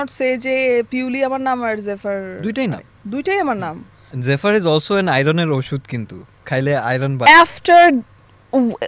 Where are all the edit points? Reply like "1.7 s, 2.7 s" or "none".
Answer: 4.1 s